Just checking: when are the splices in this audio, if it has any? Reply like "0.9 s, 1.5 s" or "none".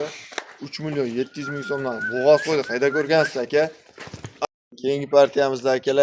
4.5 s